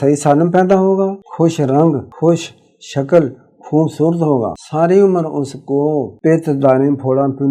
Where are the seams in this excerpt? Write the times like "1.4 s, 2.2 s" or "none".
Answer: 1.2 s, 2.1 s, 4.6 s, 6.1 s